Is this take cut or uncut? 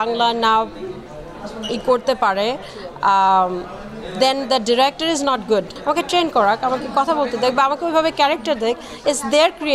cut